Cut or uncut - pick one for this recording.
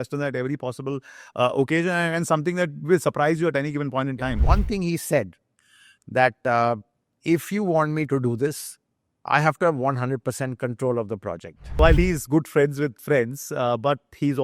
cut